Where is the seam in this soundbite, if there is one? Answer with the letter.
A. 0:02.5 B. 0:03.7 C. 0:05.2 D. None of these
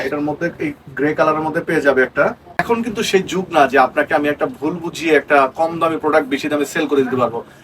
A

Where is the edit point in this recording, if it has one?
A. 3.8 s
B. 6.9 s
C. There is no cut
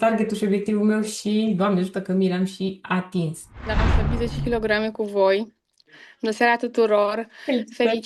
A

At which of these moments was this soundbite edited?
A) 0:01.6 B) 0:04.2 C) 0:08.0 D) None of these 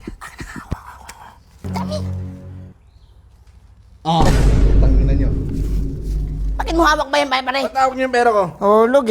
A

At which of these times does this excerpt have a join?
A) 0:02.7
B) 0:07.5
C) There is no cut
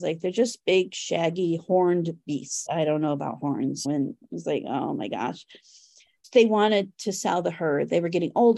A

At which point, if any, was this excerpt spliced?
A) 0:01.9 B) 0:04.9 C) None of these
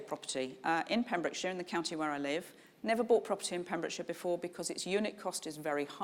C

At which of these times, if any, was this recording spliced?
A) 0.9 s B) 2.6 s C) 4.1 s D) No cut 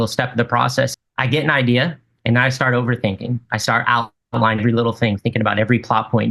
A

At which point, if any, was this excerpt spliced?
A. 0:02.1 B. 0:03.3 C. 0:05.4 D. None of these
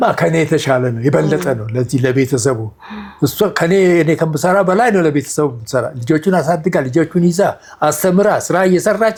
D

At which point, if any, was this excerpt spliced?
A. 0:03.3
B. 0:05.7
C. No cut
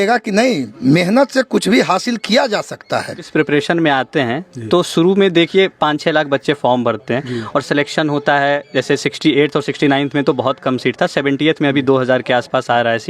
A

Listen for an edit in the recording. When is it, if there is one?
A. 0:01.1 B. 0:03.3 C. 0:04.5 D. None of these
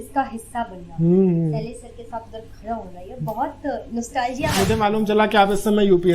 C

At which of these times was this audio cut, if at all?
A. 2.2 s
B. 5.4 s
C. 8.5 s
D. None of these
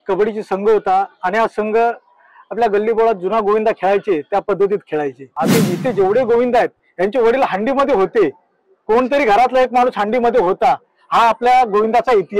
B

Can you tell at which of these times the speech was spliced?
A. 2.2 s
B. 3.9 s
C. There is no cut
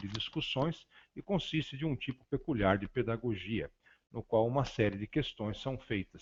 C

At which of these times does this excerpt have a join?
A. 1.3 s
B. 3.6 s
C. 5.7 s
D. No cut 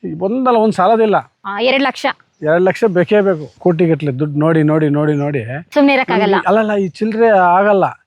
B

